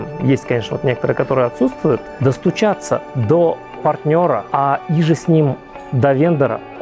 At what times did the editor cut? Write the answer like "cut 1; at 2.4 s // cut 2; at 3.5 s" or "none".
cut 1; at 2.0 s // cut 2; at 4.4 s